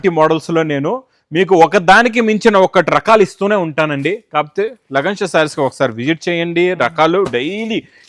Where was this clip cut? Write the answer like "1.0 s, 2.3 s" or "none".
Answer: none